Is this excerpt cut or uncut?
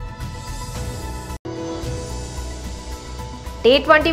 cut